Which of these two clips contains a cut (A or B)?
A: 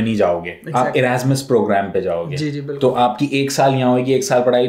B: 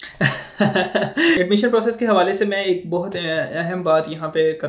B